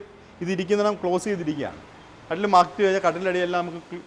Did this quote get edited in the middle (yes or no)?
no